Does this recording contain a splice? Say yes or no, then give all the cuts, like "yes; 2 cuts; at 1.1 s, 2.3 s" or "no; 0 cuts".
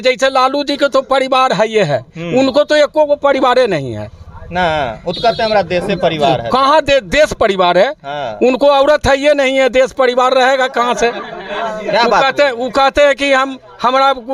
no; 0 cuts